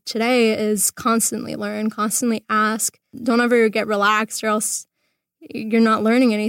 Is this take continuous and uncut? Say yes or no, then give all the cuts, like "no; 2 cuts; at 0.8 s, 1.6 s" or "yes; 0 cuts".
no; 1 cut; at 3.1 s